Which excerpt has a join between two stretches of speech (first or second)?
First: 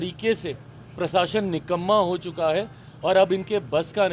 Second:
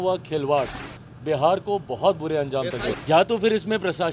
second